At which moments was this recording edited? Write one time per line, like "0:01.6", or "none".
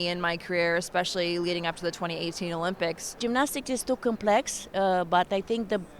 0:03.2